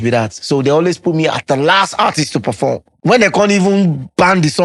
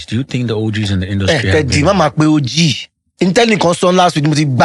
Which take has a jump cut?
first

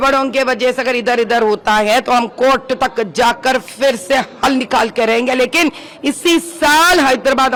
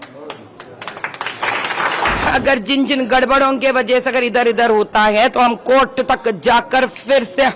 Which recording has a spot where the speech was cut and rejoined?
second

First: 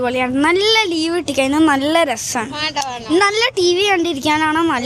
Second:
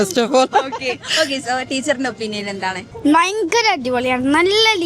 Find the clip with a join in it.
second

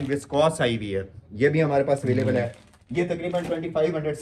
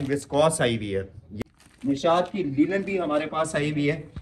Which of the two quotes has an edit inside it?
second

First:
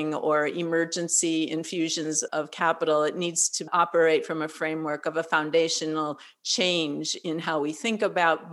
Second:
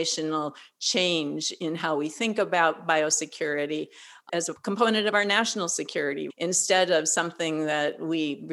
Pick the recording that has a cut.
second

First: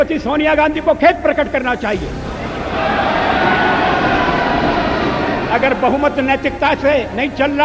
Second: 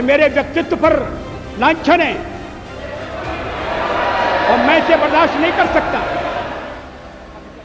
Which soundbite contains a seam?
first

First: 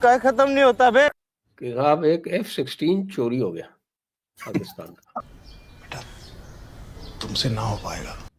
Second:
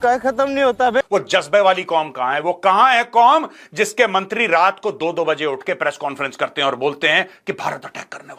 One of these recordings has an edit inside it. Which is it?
second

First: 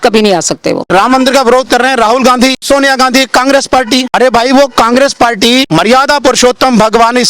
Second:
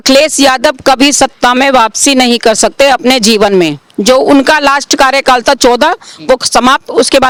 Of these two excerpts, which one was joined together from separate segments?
first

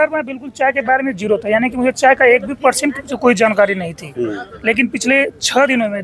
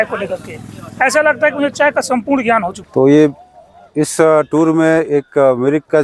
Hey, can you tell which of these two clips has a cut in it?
second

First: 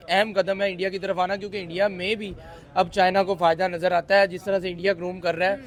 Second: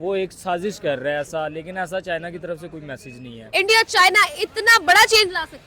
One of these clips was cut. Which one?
second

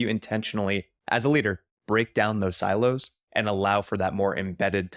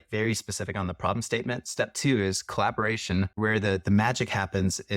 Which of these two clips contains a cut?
second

